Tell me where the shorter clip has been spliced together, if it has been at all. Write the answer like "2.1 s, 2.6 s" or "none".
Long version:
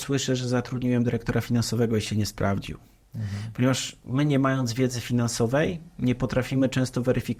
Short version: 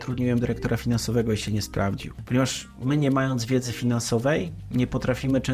2.1 s